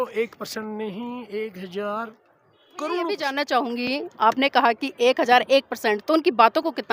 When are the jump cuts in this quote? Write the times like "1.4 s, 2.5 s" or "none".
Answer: 3.2 s